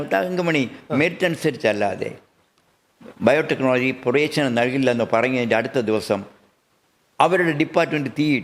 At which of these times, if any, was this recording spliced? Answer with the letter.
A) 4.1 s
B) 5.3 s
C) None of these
C